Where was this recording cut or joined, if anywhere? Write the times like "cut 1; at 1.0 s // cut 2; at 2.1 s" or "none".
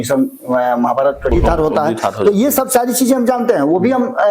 cut 1; at 1.3 s